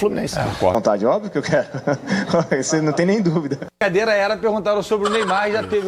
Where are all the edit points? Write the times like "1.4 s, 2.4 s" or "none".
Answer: 0.8 s, 3.8 s